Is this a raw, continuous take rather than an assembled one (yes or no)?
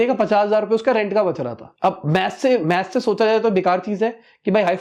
yes